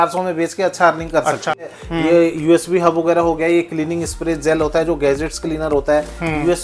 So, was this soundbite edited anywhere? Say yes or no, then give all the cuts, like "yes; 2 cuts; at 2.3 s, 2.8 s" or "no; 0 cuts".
yes; 1 cut; at 1.7 s